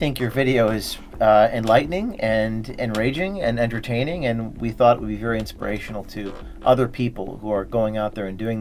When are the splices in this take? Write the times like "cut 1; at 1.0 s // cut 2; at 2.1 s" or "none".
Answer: none